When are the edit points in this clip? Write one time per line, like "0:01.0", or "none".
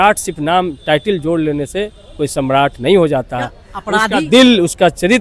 none